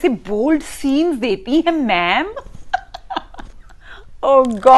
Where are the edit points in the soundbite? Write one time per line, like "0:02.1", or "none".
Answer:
none